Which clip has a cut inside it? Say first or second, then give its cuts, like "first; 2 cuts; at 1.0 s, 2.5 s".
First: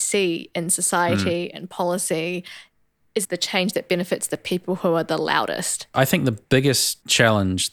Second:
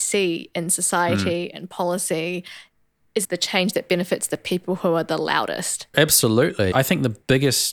first; 1 cut; at 5.9 s